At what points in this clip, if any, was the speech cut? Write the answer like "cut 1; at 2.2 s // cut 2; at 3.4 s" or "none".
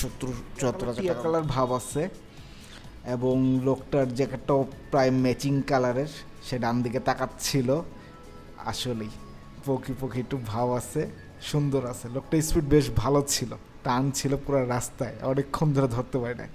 cut 1; at 1.0 s

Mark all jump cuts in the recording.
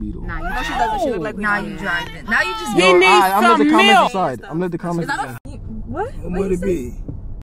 cut 1; at 5.6 s

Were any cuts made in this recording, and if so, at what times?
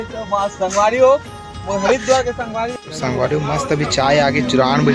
cut 1; at 2.7 s

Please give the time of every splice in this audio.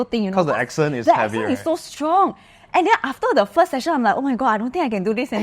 none

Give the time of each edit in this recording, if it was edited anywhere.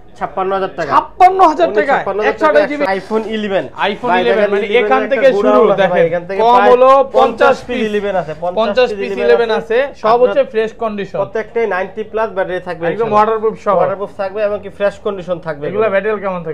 cut 1; at 2.9 s

